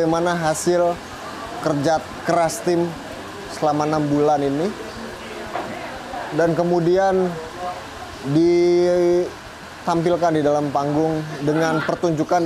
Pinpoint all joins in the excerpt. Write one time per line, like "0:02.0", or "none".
none